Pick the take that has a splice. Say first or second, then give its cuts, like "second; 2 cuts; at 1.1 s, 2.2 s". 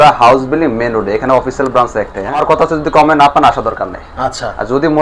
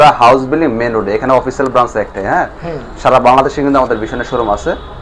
first; 1 cut; at 2.4 s